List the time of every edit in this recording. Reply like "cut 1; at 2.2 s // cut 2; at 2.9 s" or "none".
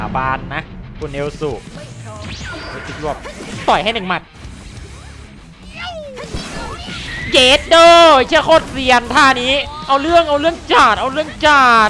cut 1; at 1.7 s